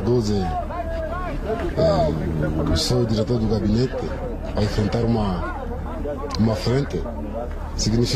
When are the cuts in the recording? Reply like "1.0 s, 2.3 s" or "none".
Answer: none